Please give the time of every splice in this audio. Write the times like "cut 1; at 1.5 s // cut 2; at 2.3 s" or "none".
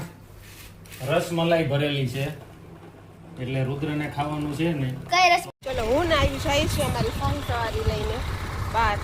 cut 1; at 5.5 s